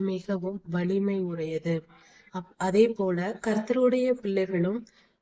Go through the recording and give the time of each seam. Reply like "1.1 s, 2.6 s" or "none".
none